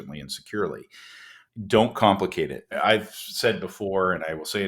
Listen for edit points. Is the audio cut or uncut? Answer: cut